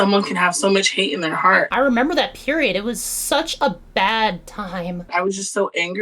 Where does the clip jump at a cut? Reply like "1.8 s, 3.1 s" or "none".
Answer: 1.7 s, 5.1 s